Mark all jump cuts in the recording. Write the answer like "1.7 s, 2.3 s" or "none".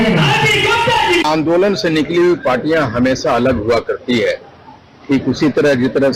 1.2 s

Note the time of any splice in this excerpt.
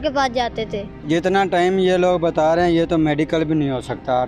1.0 s

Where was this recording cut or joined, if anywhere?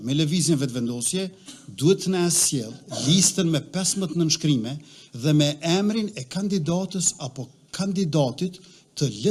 none

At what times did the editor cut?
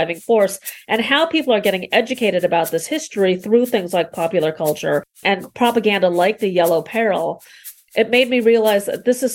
5.2 s

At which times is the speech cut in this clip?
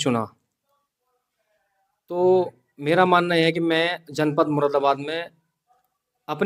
none

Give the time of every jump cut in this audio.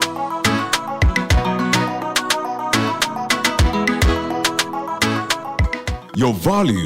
5.7 s

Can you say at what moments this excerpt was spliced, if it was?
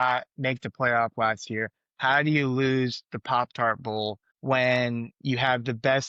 none

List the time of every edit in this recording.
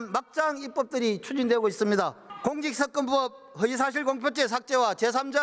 2.3 s

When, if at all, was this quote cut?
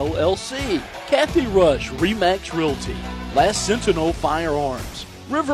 0.9 s

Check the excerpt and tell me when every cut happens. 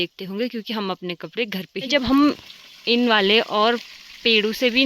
1.9 s

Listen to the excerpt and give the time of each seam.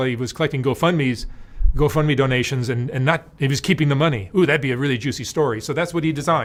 none

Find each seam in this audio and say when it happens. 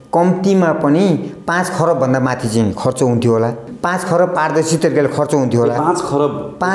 3.7 s

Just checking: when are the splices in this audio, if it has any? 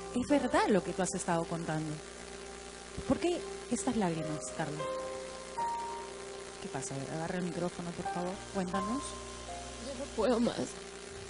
8.1 s

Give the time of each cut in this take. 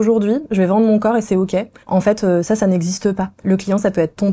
1.8 s, 3.4 s

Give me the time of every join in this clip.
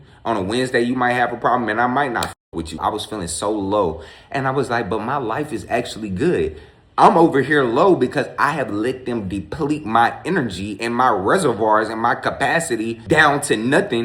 2.8 s, 13.0 s

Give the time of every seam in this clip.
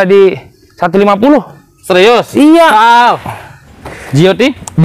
3.6 s

